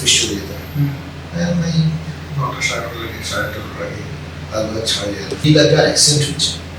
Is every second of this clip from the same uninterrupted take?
no; 1 cut; at 5.4 s

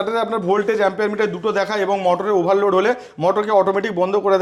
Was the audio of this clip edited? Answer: no; 0 cuts

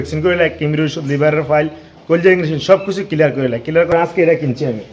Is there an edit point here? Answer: yes; 1 cut; at 3.9 s

